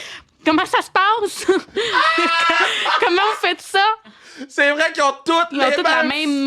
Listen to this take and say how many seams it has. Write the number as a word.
two